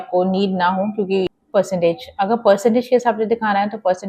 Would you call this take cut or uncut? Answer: cut